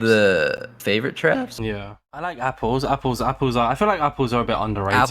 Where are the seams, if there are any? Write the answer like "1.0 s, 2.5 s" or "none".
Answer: 2.0 s

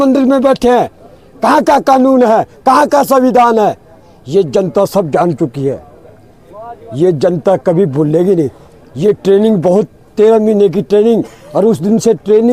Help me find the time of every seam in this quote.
none

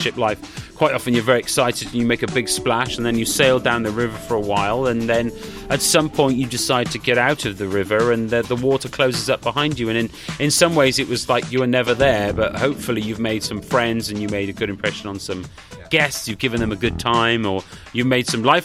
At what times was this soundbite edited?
none

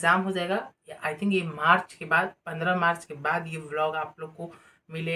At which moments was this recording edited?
none

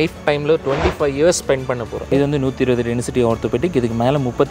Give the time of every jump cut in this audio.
2.1 s

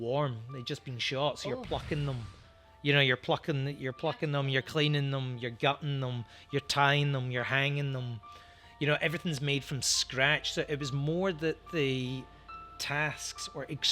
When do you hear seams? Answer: none

